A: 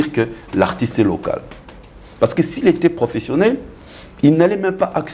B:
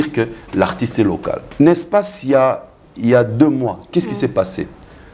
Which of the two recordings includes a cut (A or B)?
B